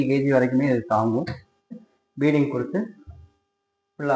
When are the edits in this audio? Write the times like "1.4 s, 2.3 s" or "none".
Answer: 1.8 s